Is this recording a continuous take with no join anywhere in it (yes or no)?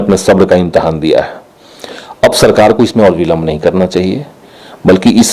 yes